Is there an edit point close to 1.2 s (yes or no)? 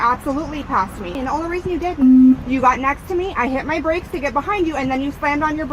yes